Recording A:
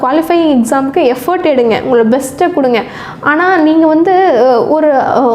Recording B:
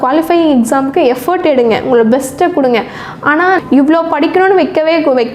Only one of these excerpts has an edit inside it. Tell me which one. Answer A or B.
B